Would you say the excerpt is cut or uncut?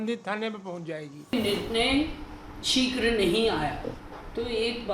cut